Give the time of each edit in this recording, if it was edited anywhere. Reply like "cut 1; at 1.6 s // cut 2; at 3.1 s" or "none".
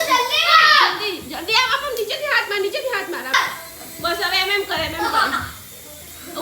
cut 1; at 3.3 s